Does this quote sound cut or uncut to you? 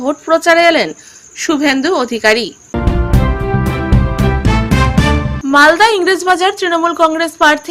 cut